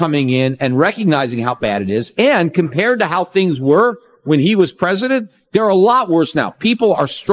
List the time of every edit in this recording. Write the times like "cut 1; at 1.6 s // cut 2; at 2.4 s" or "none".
none